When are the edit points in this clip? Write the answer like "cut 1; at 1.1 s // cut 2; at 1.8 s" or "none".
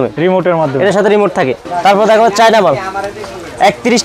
cut 1; at 1.6 s